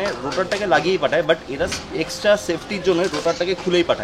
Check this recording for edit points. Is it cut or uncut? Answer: uncut